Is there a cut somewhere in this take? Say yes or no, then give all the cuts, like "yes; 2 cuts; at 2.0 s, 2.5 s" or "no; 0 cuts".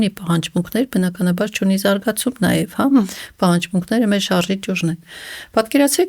no; 0 cuts